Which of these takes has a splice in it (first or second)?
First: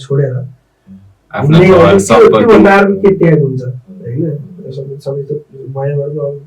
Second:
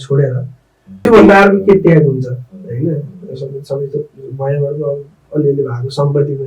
second